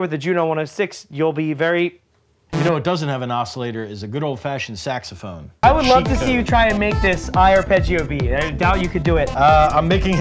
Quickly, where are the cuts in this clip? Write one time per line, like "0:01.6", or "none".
0:02.4
0:05.6